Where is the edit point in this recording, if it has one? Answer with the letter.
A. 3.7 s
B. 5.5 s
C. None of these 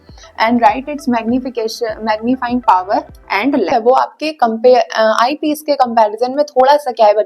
A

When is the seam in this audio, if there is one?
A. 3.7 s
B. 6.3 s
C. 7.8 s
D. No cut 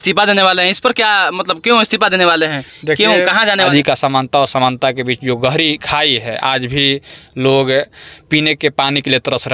A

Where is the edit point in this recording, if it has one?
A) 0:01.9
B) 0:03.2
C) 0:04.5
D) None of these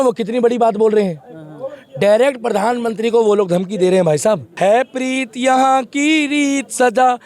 C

